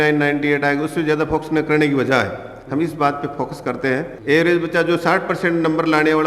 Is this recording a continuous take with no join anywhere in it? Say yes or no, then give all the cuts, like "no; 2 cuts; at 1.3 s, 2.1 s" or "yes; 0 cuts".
no; 1 cut; at 4.1 s